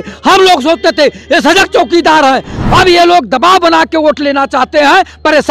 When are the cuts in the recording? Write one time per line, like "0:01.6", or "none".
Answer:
0:02.5

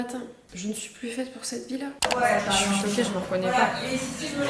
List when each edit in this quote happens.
0:02.1

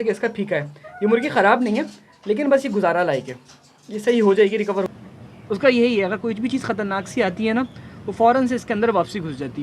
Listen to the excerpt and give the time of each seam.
0:04.9

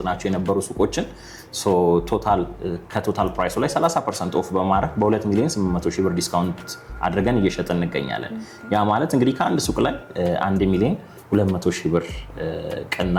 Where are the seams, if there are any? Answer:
none

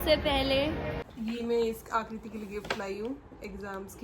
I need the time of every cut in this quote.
0:01.0

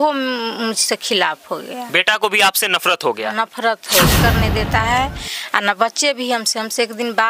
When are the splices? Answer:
0:04.1

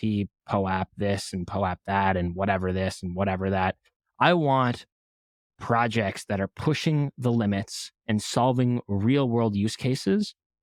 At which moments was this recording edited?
none

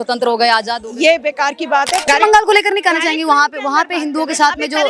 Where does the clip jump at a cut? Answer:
0:02.0

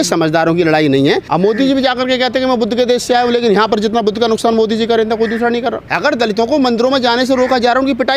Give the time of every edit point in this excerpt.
0:01.3
0:05.9

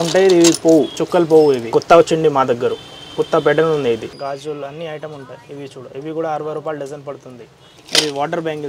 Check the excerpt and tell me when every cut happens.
0:01.7
0:04.1
0:07.8

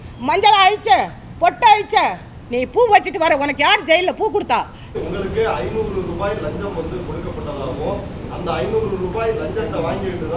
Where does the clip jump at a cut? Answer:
0:04.9

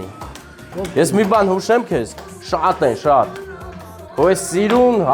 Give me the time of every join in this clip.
none

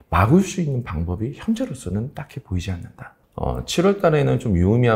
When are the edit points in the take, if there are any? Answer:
0:03.1

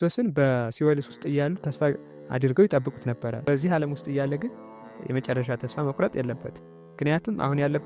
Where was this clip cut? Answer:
0:03.4

